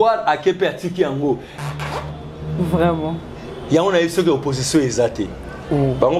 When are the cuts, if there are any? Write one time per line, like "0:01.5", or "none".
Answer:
0:01.5